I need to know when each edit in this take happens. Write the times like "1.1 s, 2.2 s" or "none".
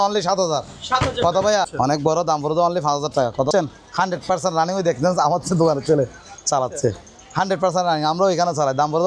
1.7 s, 3.5 s